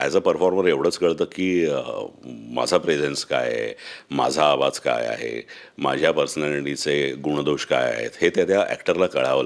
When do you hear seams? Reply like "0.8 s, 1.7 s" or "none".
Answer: none